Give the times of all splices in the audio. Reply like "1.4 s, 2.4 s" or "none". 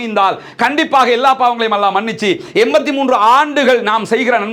none